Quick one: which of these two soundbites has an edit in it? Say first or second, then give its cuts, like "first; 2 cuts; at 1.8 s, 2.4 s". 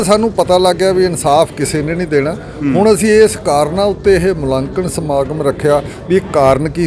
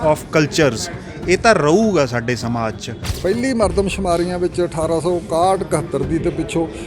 second; 1 cut; at 3.1 s